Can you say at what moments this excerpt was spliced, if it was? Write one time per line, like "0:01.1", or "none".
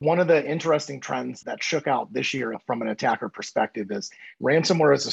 0:01.4